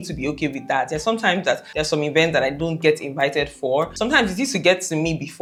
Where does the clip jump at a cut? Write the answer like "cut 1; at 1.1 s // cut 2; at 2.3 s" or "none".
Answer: none